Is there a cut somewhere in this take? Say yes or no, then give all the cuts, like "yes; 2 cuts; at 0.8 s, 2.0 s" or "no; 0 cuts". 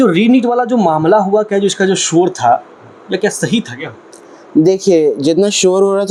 no; 0 cuts